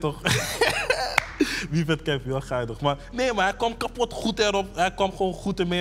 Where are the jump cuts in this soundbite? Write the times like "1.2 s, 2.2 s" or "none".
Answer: none